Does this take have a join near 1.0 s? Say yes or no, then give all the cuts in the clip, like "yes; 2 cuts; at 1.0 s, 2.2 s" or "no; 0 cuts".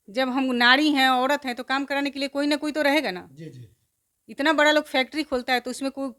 no; 0 cuts